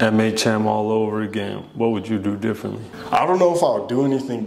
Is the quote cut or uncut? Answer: cut